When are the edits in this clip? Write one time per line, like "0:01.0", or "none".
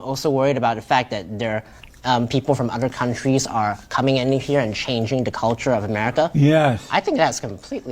none

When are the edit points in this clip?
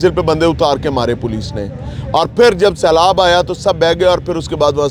none

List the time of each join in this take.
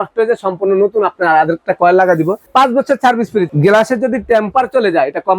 0:03.5

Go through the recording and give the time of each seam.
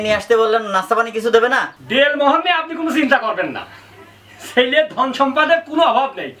0:01.8

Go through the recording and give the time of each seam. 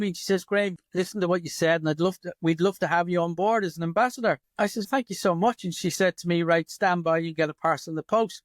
none

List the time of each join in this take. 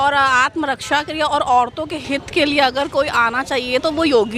none

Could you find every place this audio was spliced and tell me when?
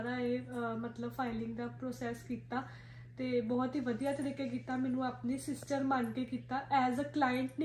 none

